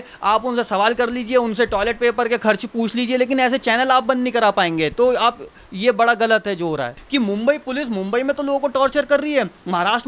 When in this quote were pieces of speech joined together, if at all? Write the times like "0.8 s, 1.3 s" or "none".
7.0 s